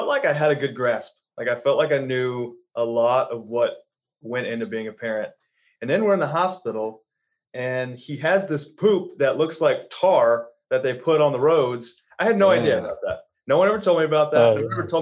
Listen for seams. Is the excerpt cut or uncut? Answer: uncut